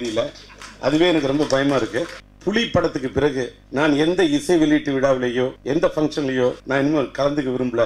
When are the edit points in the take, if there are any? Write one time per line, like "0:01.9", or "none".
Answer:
0:02.2
0:03.6
0:05.6
0:06.6